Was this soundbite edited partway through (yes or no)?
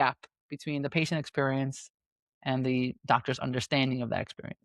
no